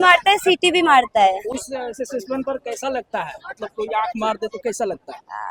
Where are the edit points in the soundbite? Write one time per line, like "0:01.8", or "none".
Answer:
none